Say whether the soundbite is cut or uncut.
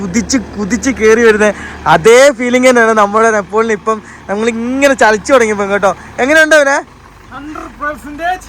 uncut